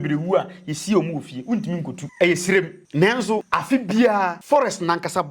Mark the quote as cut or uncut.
cut